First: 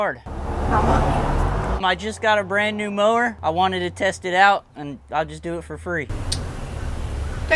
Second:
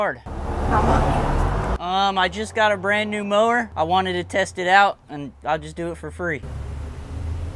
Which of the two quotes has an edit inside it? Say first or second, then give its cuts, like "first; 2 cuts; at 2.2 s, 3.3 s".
first; 2 cuts; at 1.8 s, 6.1 s